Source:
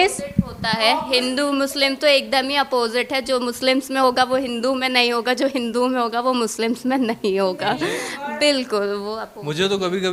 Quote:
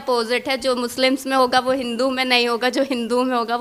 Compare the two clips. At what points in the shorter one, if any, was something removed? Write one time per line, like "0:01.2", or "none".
none